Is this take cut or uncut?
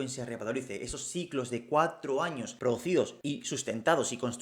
cut